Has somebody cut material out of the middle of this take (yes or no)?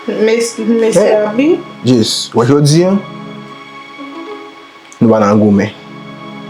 no